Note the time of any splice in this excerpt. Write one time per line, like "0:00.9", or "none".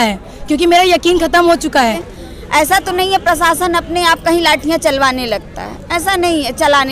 0:02.1